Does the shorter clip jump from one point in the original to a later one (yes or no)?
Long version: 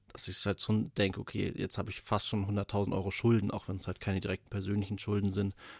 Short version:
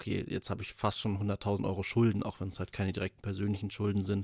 no